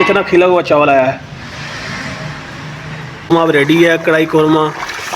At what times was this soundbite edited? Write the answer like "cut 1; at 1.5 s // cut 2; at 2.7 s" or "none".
cut 1; at 3.1 s